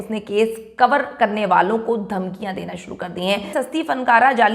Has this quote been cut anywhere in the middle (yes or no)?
yes